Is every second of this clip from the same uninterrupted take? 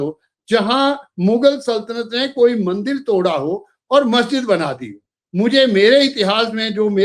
yes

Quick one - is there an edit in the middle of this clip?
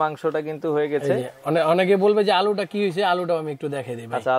no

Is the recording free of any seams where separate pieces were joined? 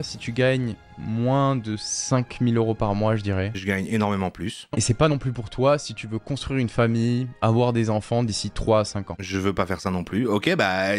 yes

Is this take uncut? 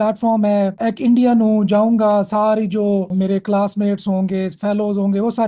no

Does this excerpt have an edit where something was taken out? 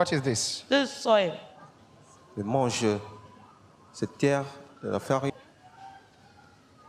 no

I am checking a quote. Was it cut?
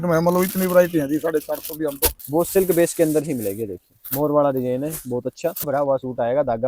yes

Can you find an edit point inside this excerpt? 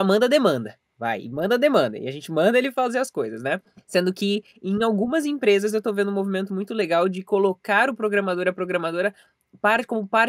no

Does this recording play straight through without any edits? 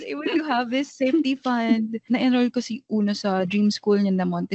no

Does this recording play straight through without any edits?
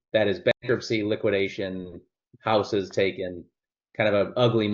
yes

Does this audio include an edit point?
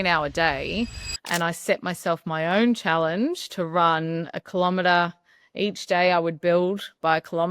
yes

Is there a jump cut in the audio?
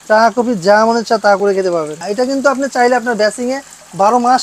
yes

